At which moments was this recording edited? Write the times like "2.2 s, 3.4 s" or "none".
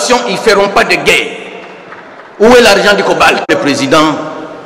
3.5 s

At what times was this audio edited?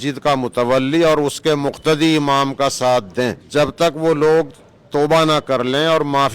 3.4 s

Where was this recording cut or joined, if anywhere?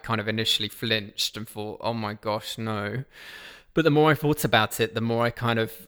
none

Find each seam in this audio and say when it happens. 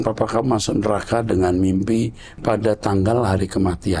2.4 s

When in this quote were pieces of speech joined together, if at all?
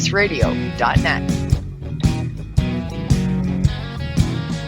0.9 s

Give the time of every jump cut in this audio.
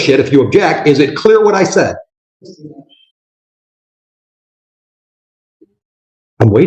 none

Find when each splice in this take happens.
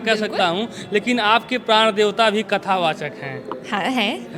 none

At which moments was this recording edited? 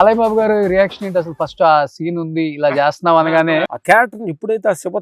3.6 s

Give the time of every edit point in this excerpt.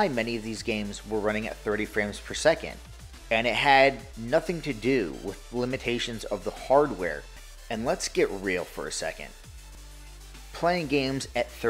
7.3 s, 9.7 s

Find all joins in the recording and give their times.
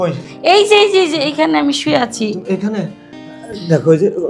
3.1 s

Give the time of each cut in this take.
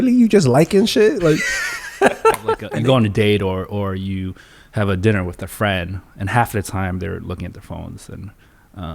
2.6 s

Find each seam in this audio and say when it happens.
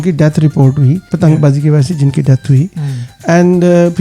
1.1 s

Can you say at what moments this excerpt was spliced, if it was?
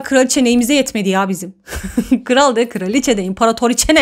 none

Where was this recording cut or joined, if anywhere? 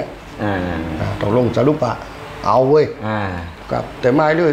3.5 s

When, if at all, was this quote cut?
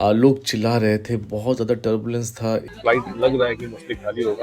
2.7 s

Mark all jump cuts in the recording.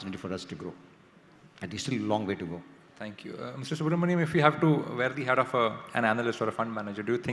none

